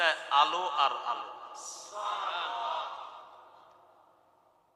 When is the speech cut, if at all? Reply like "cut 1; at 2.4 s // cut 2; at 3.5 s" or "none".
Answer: none